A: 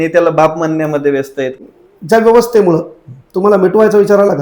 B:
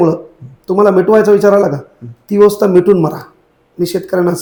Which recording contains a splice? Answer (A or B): A